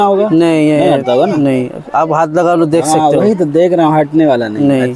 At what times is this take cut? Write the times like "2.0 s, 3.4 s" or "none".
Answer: none